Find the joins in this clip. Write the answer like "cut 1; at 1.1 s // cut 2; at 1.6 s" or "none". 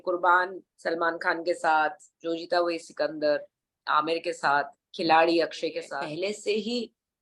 cut 1; at 5.8 s